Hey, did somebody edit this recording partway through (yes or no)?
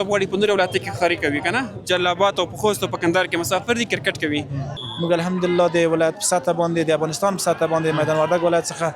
yes